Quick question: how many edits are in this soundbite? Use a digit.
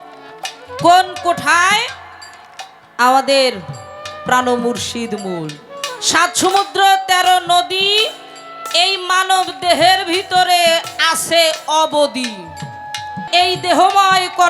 2